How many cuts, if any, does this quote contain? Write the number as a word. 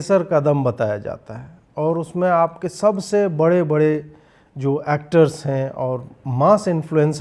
zero